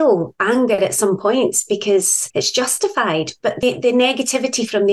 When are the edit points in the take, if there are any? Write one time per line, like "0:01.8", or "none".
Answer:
0:02.2
0:03.6